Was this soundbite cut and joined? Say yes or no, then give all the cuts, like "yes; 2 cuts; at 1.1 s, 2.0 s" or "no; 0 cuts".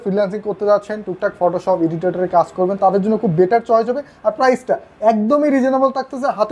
no; 0 cuts